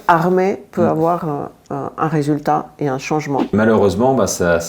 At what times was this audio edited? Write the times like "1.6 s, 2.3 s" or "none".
3.5 s